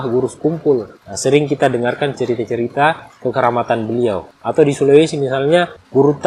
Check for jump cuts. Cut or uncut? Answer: uncut